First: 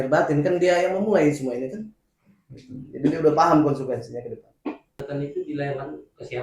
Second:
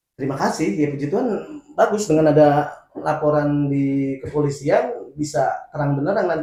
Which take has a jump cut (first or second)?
first